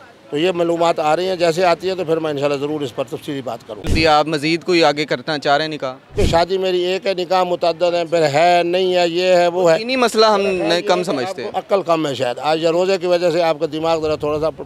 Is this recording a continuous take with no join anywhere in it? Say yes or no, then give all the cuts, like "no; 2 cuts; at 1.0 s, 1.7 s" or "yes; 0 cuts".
no; 2 cuts; at 3.9 s, 6.1 s